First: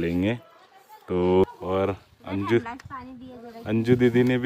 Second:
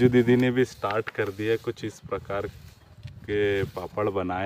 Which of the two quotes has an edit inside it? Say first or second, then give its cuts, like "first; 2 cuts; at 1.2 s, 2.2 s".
first; 1 cut; at 1.5 s